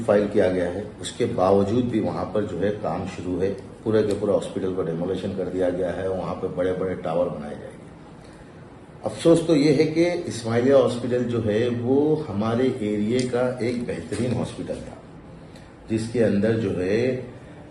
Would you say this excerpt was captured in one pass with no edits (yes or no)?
yes